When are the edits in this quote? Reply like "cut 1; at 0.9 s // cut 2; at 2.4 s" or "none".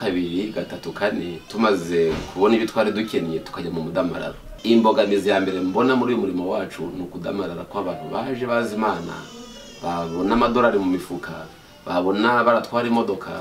cut 1; at 1.4 s // cut 2; at 4.5 s